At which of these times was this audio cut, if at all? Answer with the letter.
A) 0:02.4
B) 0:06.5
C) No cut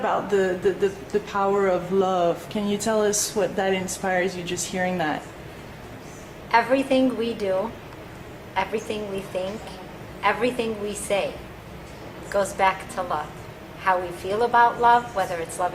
B